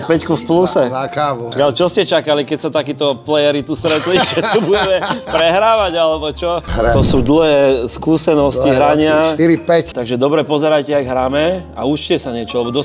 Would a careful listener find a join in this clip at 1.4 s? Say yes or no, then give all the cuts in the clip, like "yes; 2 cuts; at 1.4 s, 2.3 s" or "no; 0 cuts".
yes; 3 cuts; at 1.4 s, 6.7 s, 9.9 s